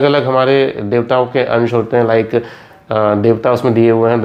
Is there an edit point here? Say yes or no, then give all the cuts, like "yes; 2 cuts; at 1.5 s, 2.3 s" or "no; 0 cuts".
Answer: no; 0 cuts